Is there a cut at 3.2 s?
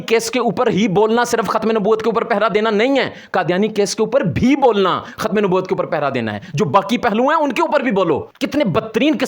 no; 1 cut; at 8.3 s

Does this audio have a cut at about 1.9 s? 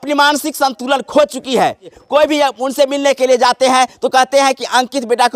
yes; 1 cut; at 1.9 s

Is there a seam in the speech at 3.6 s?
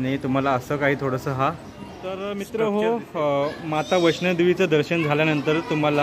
no; 1 cut; at 2.0 s

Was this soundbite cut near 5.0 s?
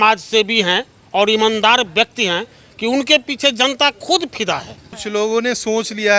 yes; 1 cut; at 5.0 s

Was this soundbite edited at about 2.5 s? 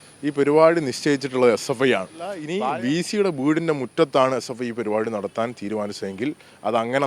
yes; 1 cut; at 2.5 s

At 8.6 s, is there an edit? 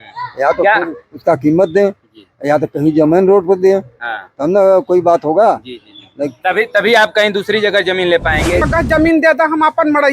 yes; 1 cut; at 8.6 s

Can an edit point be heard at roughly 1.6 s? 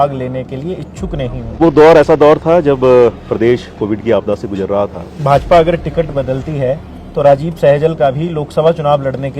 yes; 2 cuts; at 1.6 s, 5.1 s

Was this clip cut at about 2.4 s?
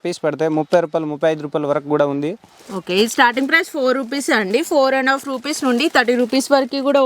no; 0 cuts

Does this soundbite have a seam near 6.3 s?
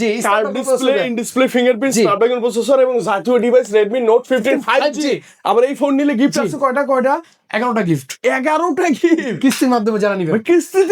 no; 0 cuts

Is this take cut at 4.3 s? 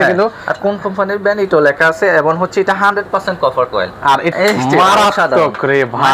yes; 1 cut; at 4.3 s

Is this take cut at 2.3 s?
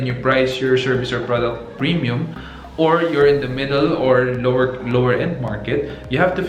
no; 0 cuts

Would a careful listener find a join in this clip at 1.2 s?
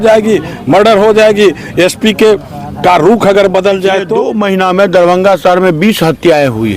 no; 1 cut; at 4.2 s

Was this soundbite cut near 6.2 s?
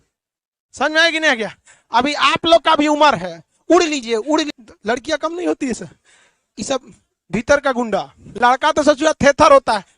no; 2 cuts; at 4.6 s, 8.2 s

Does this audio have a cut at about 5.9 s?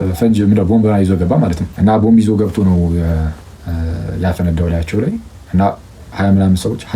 no; 1 cut; at 1.6 s

